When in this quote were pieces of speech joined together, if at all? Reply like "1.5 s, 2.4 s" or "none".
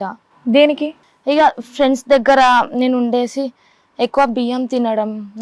none